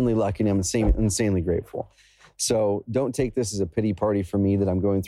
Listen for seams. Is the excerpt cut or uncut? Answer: uncut